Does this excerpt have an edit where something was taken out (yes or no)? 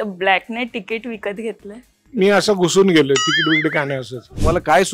yes